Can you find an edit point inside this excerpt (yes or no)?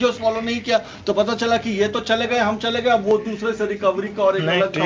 no